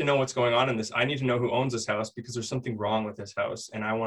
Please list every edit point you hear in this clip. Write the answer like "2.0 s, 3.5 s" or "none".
none